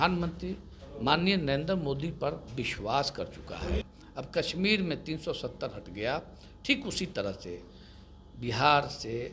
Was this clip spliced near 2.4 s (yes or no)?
no